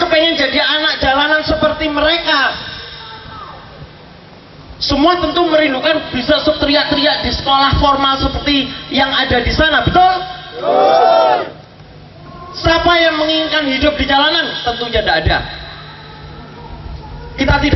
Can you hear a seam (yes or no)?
no